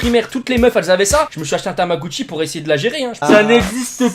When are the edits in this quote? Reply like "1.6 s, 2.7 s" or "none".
3.2 s